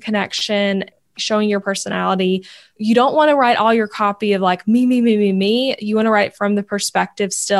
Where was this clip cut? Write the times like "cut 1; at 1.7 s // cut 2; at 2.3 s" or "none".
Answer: cut 1; at 1.0 s // cut 2; at 2.7 s